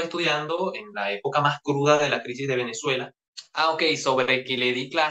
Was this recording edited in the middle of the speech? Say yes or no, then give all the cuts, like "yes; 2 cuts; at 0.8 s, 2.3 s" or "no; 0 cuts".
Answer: yes; 1 cut; at 3.3 s